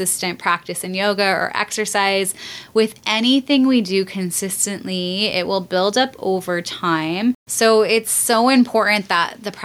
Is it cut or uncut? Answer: uncut